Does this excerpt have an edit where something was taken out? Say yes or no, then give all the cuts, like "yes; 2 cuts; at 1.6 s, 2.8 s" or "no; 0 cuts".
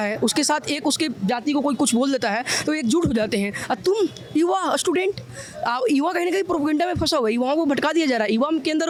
no; 0 cuts